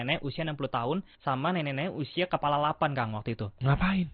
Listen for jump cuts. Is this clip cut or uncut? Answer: cut